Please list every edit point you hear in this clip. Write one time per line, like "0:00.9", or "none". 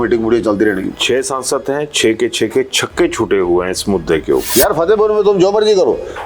0:00.9
0:04.5